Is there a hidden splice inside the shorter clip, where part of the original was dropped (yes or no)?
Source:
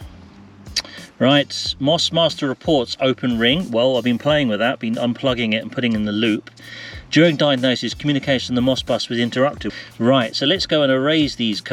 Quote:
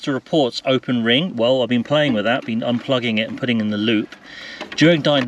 no